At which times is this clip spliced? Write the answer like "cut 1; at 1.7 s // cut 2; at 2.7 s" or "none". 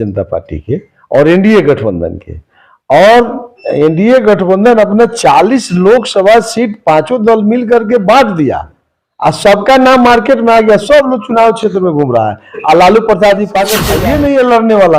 cut 1; at 13.9 s